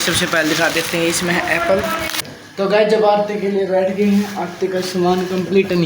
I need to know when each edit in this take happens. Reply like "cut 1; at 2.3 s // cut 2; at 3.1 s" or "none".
cut 1; at 2.3 s